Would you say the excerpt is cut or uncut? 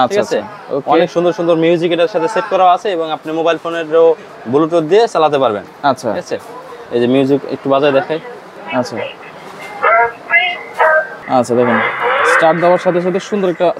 uncut